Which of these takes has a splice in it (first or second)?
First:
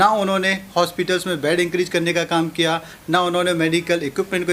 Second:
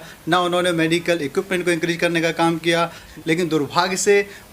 second